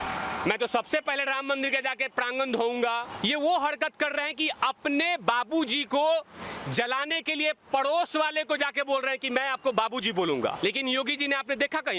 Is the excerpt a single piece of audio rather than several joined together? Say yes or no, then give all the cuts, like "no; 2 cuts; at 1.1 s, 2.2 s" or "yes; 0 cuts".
no; 2 cuts; at 3.1 s, 10.6 s